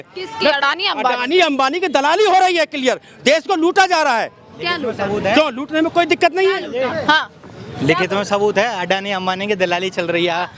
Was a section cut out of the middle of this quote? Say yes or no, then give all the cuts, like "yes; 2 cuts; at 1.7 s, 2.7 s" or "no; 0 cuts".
no; 0 cuts